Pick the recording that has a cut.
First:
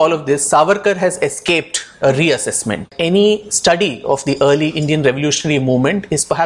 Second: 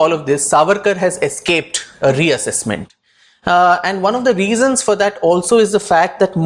first; 1 cut; at 2.9 s

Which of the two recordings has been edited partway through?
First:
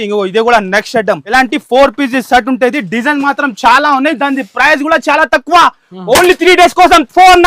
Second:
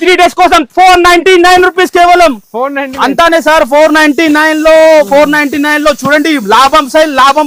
first; 1 cut; at 1.2 s

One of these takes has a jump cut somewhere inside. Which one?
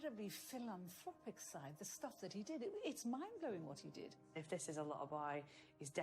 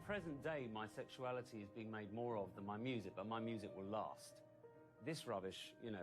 first; 1 cut; at 4.4 s

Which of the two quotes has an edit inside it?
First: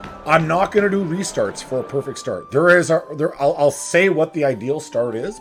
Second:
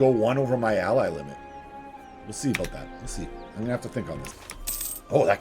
second; 1 cut; at 4.3 s

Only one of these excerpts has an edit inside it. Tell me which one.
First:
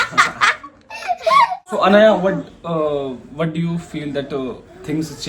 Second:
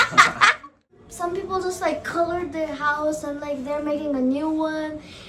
second; 1 cut; at 0.9 s

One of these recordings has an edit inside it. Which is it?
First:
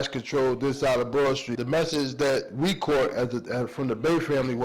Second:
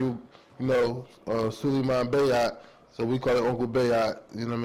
first; 1 cut; at 1.5 s

